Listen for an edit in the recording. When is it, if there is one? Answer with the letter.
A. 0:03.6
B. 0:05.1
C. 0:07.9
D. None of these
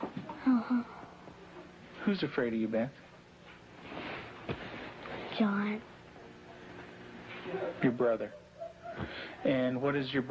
C